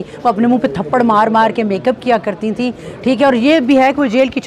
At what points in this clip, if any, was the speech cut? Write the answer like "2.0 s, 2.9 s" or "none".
none